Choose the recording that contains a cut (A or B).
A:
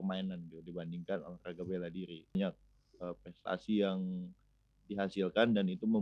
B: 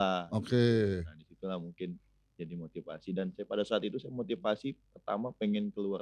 A